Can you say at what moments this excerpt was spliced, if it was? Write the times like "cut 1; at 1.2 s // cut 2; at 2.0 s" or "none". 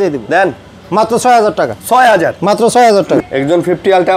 cut 1; at 3.2 s